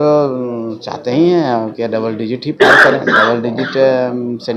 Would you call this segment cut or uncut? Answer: uncut